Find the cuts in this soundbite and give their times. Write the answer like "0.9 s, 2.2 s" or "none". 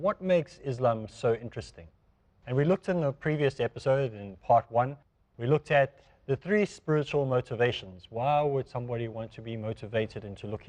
8.8 s